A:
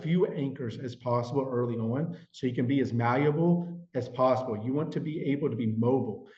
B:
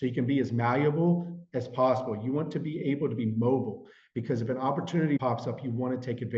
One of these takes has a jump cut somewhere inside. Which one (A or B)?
B